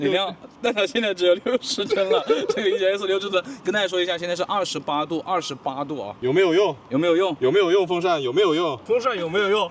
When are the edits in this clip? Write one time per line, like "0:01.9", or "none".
0:06.2
0:08.8